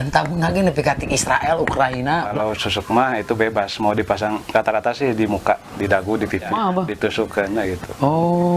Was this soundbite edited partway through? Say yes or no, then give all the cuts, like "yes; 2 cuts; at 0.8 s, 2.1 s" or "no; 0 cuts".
yes; 2 cuts; at 2.3 s, 6.5 s